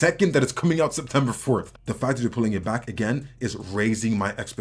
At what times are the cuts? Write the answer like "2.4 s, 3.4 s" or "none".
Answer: 1.8 s